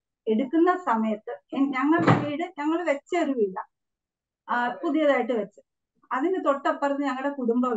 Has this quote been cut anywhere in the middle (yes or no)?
no